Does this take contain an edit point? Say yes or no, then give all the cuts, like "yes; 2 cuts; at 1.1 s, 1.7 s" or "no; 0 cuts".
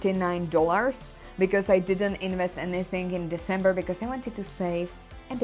no; 0 cuts